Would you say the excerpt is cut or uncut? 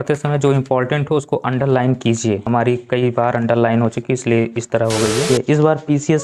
cut